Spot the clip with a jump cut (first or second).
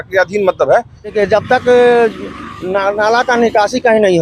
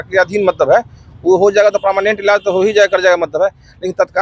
first